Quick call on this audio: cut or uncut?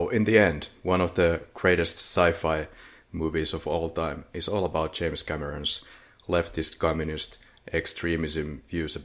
uncut